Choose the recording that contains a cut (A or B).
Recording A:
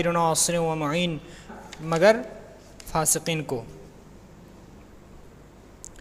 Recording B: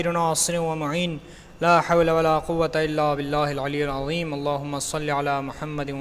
B